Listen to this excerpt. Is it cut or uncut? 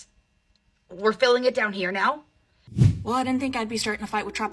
cut